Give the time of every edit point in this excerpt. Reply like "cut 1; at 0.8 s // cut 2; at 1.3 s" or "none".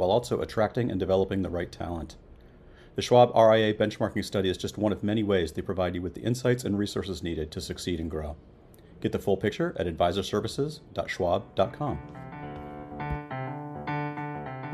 cut 1; at 12.1 s